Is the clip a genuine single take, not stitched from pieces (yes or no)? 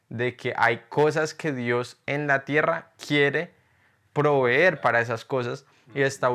yes